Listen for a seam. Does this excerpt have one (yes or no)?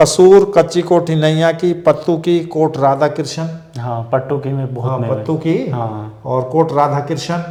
no